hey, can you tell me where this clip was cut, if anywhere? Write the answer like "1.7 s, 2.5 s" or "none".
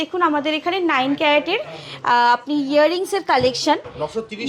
none